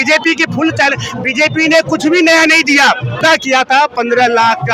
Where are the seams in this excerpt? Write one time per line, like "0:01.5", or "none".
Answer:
0:03.2